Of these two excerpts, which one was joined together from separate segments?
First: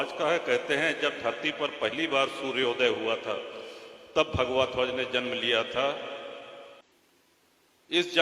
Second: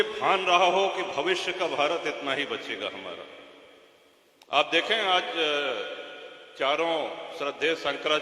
first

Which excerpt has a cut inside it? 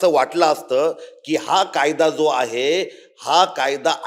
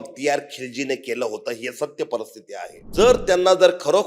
second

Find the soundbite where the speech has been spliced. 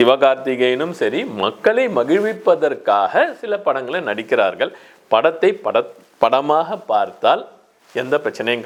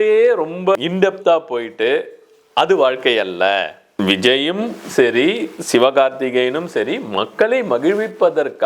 second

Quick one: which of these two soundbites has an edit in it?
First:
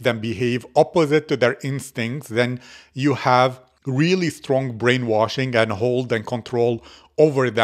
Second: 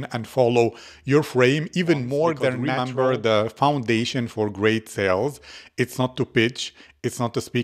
second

